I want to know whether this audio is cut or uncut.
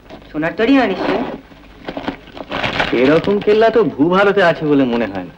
uncut